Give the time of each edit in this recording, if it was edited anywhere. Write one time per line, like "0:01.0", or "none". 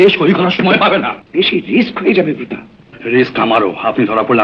0:01.2